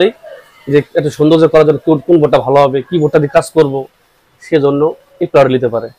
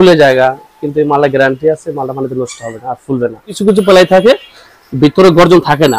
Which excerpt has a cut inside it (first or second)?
second